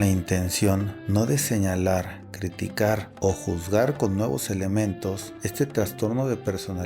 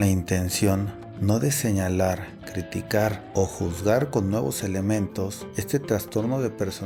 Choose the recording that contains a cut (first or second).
first